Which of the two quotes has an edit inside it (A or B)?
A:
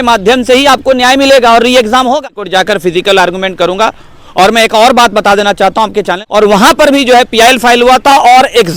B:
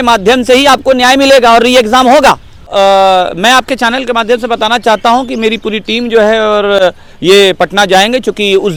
A